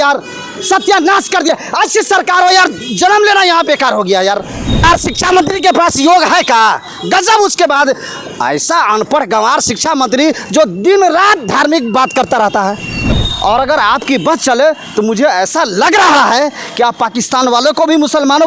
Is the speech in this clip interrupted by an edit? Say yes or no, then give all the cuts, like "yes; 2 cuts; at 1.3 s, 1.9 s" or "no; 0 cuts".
yes; 2 cuts; at 4.8 s, 13.2 s